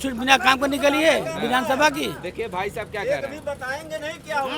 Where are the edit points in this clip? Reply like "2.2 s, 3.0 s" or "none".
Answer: none